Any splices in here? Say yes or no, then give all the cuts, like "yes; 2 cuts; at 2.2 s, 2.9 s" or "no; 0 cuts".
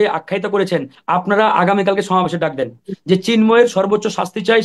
yes; 1 cut; at 0.9 s